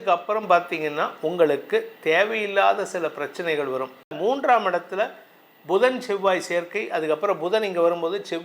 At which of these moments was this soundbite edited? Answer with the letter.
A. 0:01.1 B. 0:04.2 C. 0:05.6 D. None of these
B